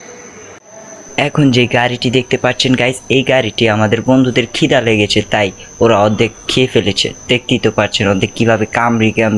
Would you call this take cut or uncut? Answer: uncut